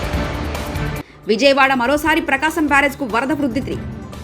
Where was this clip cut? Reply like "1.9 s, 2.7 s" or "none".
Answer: 0.9 s